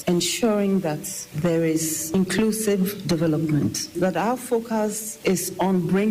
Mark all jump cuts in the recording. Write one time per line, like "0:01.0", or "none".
0:03.9
0:05.1